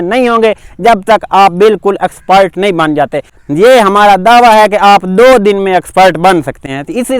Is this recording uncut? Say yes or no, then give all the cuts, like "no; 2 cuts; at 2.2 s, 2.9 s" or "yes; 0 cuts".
yes; 0 cuts